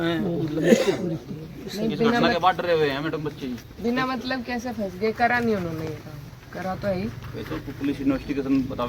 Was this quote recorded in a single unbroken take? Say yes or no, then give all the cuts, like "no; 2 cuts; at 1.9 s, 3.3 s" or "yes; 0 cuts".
yes; 0 cuts